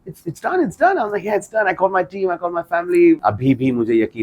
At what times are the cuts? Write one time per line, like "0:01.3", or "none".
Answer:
0:03.2